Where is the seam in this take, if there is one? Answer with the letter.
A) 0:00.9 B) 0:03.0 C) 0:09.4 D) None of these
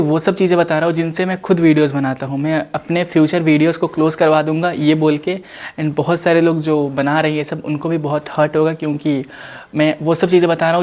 D